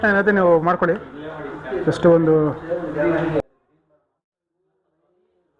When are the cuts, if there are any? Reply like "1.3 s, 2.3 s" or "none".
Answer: none